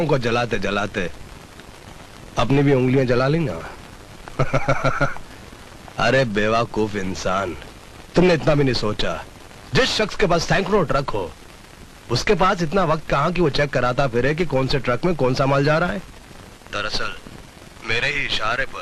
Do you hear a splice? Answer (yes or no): no